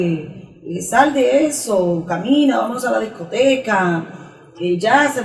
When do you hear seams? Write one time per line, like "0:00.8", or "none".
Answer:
none